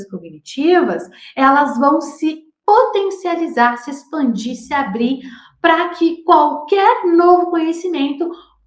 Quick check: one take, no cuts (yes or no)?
yes